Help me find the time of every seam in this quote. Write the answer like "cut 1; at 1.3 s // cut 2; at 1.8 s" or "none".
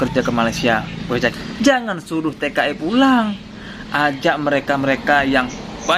cut 1; at 1.2 s